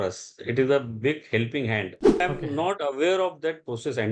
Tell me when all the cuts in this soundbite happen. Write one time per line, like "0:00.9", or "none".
0:02.2